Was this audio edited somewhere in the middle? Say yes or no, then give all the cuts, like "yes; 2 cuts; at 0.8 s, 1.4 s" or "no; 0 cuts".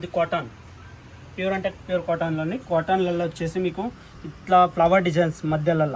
no; 0 cuts